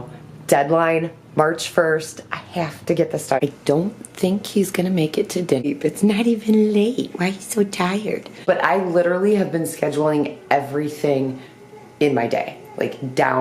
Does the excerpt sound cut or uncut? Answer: cut